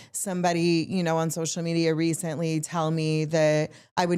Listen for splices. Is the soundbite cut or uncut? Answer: uncut